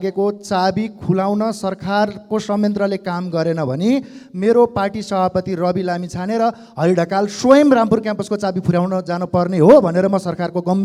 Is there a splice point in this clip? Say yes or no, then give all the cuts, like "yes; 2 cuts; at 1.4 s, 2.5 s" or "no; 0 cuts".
no; 0 cuts